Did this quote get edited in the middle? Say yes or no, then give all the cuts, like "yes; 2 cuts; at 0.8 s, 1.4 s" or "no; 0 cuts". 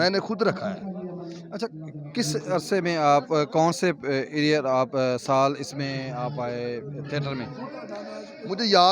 no; 0 cuts